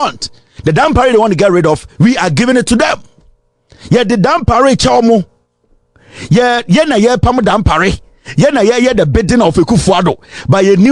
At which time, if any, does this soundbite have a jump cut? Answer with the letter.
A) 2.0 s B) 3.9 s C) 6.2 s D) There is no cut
D